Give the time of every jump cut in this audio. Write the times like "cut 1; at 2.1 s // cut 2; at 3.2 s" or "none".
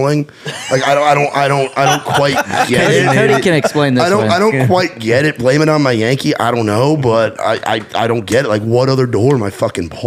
none